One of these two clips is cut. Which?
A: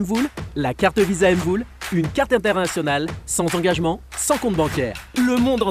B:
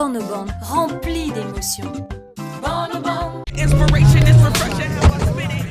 B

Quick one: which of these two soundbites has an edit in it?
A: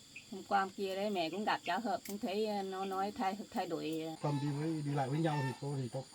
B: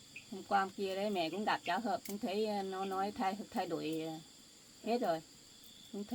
A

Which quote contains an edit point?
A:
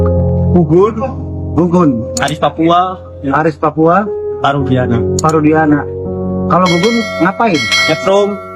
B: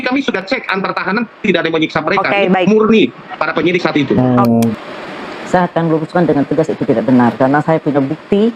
B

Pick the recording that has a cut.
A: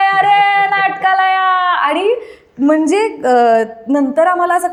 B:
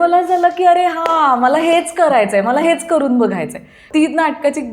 B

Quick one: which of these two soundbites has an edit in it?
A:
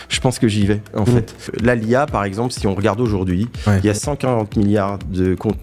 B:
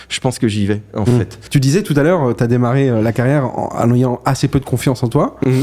A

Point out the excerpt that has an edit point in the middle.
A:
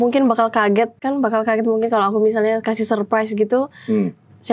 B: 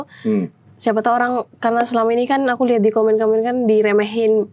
A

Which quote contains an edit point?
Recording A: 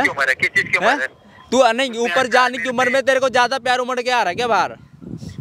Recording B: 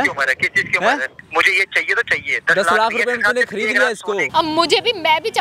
B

